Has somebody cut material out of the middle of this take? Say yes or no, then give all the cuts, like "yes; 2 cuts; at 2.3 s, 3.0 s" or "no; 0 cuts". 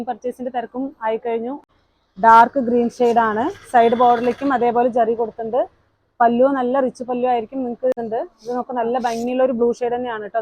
yes; 2 cuts; at 1.7 s, 7.9 s